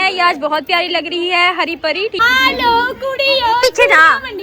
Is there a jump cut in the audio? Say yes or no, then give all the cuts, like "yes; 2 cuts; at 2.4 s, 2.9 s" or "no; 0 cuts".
yes; 1 cut; at 2.2 s